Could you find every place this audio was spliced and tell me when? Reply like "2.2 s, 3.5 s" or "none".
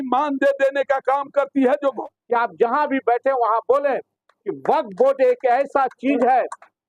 2.0 s